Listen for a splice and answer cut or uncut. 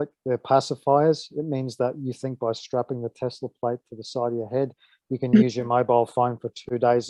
uncut